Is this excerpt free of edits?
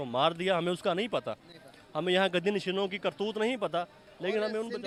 yes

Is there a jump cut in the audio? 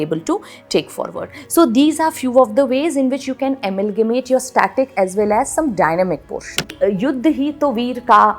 yes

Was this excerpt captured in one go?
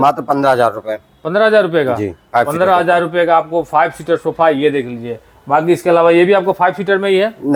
yes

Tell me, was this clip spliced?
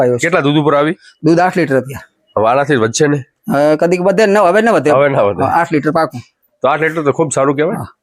no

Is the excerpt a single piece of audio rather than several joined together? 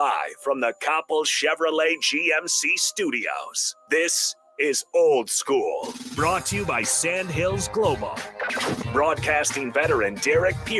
yes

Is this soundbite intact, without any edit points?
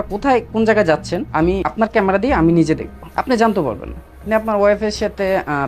no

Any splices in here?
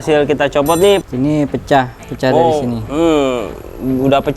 yes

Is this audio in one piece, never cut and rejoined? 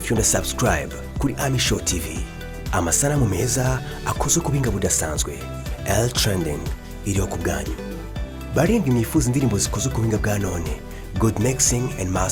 yes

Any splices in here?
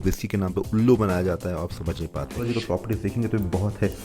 yes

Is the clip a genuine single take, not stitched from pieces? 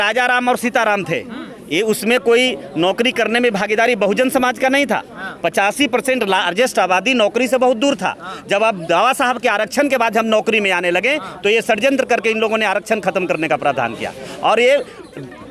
yes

